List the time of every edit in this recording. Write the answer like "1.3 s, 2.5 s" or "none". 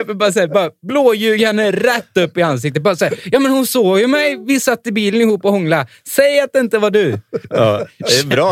none